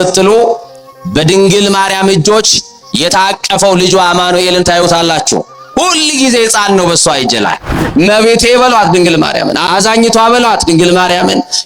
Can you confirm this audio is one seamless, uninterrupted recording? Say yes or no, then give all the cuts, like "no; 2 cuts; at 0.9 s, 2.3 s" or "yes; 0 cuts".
no; 1 cut; at 7.8 s